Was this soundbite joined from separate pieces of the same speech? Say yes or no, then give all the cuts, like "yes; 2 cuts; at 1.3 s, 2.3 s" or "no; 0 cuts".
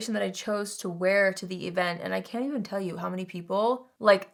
no; 0 cuts